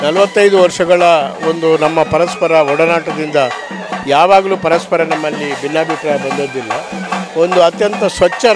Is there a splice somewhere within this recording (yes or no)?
no